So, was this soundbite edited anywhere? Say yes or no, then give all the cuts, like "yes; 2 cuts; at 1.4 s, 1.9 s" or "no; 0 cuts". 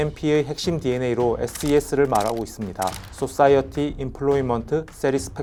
no; 0 cuts